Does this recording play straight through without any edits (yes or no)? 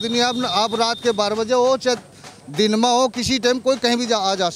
yes